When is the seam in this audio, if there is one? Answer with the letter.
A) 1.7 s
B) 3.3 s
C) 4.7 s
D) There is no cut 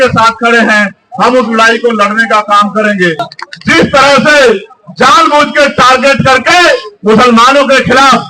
B